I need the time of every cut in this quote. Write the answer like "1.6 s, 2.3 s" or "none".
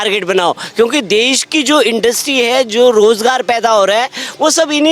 none